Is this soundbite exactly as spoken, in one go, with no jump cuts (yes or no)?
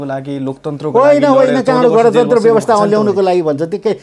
yes